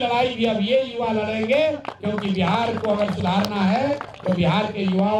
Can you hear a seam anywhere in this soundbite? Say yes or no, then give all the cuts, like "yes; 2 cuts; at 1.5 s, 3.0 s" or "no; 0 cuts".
no; 0 cuts